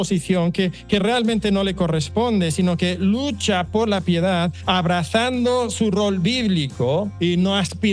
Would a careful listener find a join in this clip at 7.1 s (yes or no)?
yes